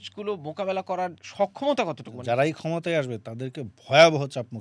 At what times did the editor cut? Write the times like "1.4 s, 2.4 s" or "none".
1.2 s, 2.1 s